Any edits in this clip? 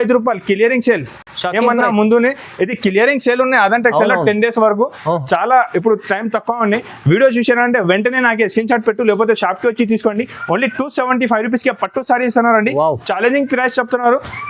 no; 0 cuts

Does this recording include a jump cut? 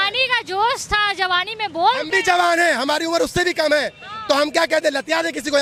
no; 0 cuts

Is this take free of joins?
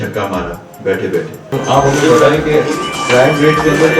no; 1 cut; at 1.5 s

